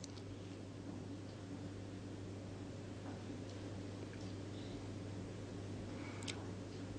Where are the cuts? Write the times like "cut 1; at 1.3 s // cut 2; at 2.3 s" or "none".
cut 1; at 4.6 s